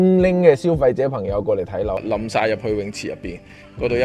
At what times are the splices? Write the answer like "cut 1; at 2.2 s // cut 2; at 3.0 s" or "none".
cut 1; at 2.0 s